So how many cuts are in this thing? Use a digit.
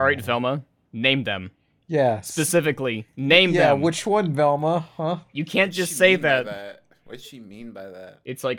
0